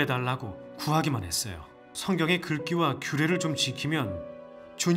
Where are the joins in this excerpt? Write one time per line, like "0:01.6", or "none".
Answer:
0:01.9